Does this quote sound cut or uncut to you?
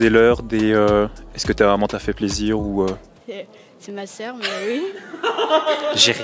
uncut